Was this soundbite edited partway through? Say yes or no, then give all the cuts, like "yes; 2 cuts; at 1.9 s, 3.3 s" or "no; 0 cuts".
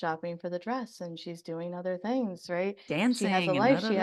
no; 0 cuts